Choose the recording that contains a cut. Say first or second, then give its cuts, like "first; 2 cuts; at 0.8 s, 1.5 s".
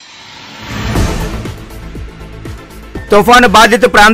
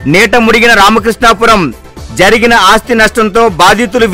first; 1 cut; at 3.1 s